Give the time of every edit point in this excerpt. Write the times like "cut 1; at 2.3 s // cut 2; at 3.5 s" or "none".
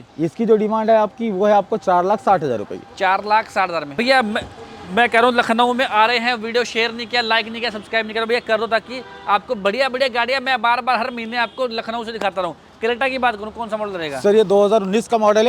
none